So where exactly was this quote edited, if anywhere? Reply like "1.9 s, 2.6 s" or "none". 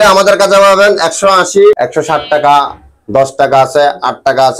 1.8 s